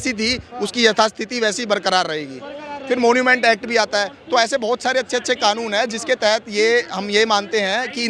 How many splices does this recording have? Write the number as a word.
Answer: zero